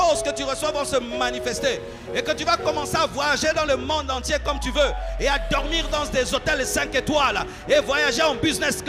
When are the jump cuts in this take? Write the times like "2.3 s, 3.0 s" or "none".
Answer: none